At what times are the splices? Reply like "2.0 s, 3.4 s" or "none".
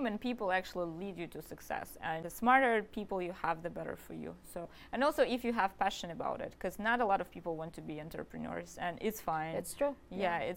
2.2 s, 4.7 s